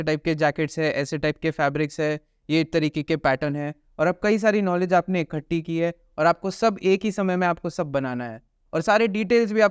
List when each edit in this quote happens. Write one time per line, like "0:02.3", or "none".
0:02.4
0:08.6